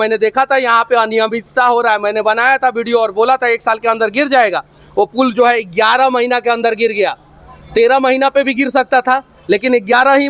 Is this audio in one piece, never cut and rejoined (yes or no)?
yes